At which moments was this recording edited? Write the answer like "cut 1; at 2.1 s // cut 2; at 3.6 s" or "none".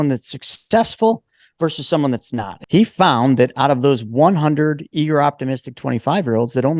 cut 1; at 2.5 s